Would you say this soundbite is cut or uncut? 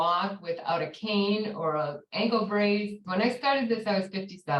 cut